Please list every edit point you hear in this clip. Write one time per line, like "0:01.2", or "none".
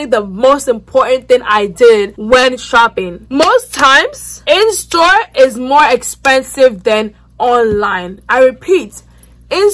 none